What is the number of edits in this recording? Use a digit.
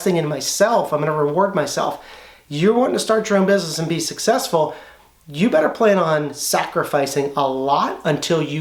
0